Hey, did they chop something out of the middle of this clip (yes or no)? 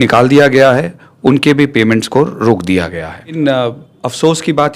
yes